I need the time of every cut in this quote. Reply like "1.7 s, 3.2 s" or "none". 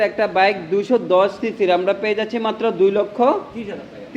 none

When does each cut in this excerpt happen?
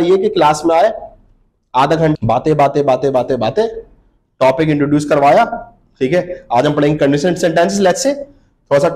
2.1 s

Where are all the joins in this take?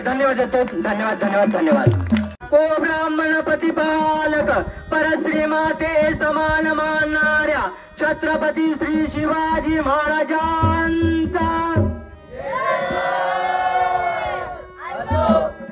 2.4 s

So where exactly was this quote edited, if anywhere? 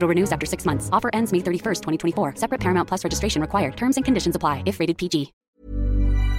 5.4 s

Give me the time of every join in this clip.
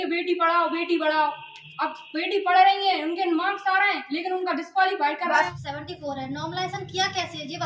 5.5 s

